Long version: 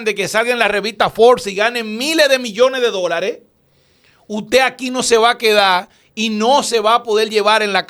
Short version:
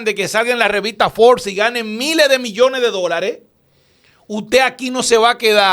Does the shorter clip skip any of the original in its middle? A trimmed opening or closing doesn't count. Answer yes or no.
no